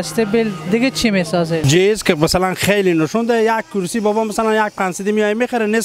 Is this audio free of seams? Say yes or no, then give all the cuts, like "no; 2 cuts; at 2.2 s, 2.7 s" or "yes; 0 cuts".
no; 1 cut; at 1.7 s